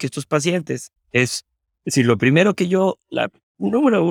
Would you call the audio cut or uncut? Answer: cut